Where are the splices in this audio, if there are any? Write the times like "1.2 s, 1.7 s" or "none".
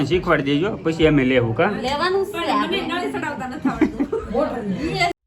none